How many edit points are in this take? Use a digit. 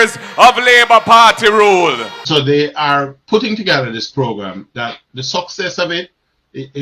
1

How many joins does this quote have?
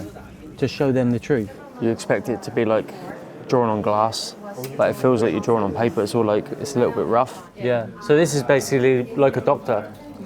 2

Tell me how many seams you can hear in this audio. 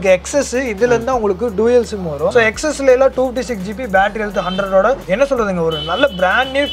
2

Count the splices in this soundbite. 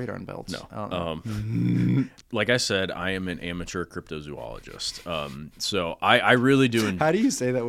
1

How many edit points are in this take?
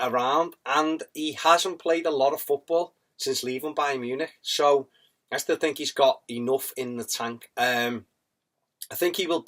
0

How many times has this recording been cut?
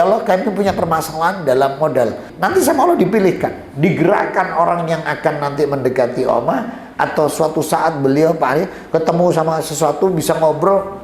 1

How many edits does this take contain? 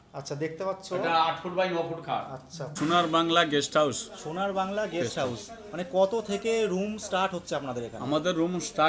1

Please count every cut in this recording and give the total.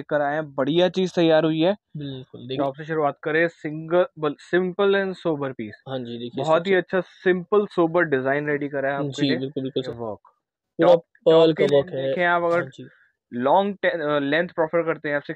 2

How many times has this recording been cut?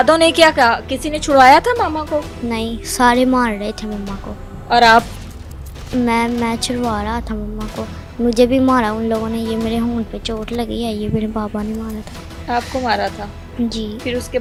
0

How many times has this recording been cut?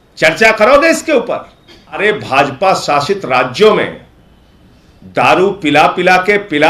1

